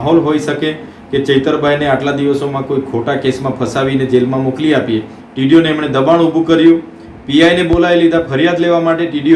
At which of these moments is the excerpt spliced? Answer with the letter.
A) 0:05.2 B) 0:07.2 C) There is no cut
A